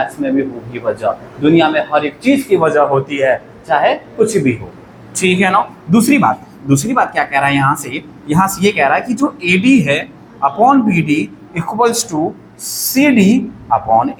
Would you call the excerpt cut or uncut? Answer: uncut